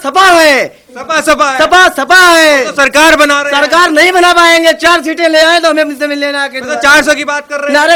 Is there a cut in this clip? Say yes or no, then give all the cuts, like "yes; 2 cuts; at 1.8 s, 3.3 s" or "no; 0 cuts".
no; 0 cuts